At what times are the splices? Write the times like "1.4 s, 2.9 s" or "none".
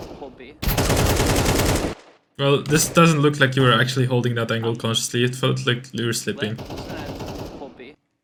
none